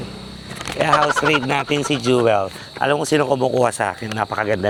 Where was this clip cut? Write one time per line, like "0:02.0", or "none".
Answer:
none